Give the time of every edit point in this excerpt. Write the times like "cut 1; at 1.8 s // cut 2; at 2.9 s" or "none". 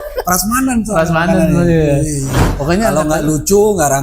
cut 1; at 2.4 s